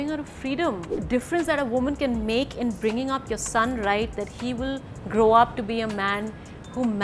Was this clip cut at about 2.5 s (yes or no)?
no